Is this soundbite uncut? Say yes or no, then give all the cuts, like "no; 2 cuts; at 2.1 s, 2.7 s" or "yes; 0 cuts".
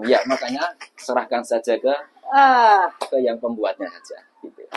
yes; 0 cuts